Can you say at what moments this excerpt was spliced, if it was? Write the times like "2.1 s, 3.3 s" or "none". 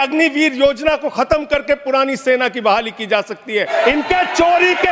3.7 s